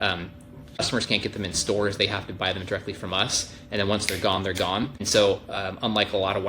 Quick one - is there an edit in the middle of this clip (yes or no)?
yes